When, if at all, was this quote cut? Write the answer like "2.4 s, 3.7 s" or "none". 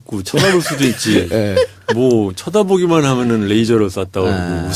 none